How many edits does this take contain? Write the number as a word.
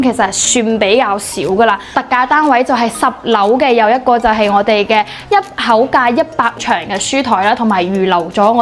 two